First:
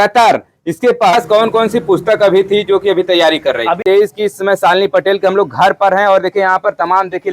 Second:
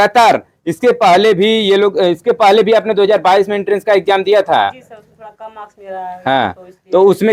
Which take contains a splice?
first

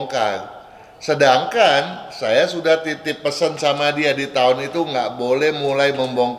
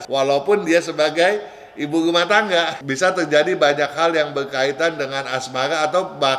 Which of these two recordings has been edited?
second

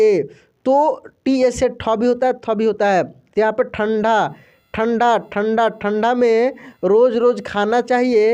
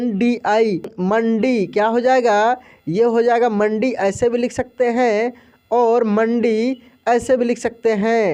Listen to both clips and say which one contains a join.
second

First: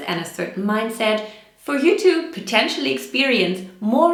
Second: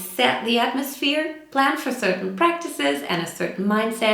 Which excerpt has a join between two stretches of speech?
second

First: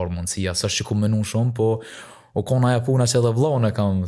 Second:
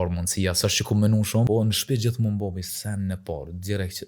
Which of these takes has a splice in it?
second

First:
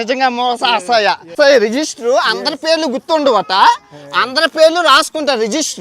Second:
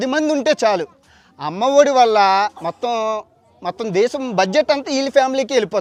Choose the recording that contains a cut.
first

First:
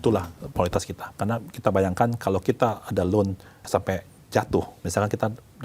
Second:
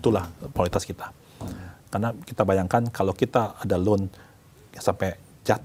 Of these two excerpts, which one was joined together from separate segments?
first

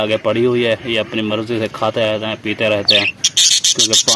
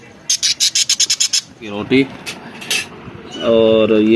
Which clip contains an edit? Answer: second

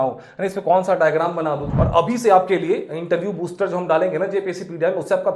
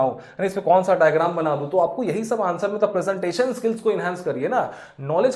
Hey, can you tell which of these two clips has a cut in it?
first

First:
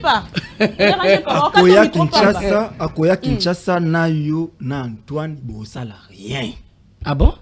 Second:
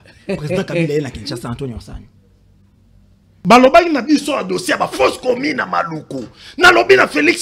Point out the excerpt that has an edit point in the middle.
second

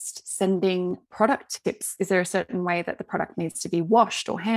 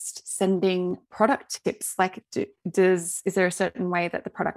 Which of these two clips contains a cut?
first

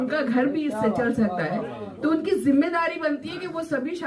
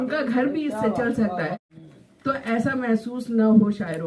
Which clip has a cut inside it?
second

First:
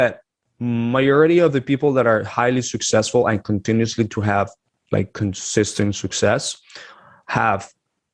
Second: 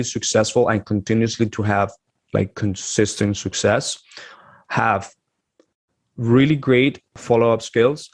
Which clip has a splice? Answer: second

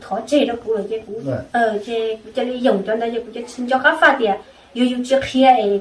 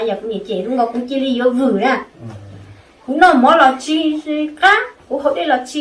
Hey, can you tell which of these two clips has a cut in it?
first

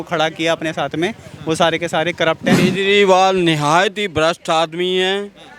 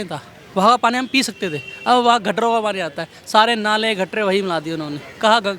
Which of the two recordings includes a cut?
first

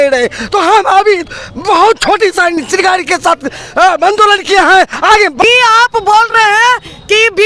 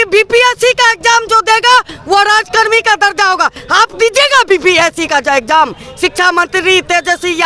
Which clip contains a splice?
first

